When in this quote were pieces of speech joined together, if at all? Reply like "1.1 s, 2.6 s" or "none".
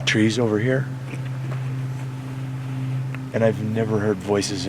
none